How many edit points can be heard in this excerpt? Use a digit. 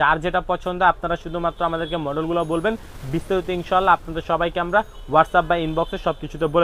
0